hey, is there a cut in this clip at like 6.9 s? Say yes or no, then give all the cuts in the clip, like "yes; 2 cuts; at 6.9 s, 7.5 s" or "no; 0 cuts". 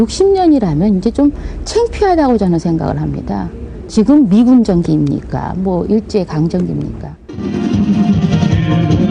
yes; 2 cuts; at 6.9 s, 8.2 s